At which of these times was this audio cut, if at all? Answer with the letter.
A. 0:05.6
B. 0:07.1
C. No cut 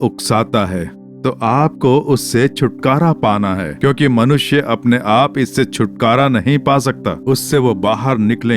B